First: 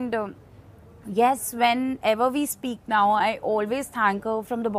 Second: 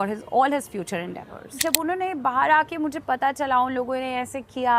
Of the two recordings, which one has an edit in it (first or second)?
second